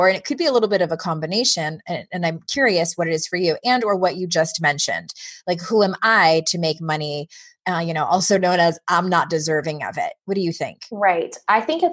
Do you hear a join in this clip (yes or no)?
yes